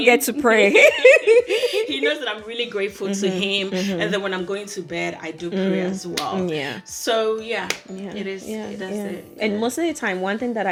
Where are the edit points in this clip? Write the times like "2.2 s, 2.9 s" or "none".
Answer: none